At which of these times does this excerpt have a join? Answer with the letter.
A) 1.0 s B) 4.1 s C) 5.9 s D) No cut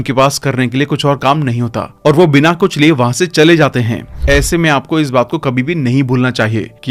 B